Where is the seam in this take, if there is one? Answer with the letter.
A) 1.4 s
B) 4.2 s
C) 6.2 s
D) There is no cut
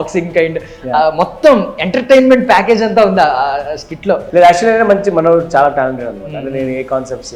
B